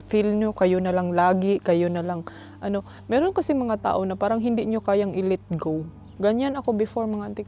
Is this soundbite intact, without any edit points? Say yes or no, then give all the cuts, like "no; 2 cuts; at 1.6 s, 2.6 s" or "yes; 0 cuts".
yes; 0 cuts